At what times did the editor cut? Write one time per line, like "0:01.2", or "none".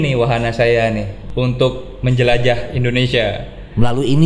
0:01.2